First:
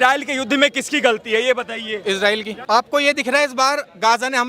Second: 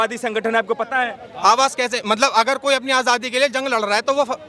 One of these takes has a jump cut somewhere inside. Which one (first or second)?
first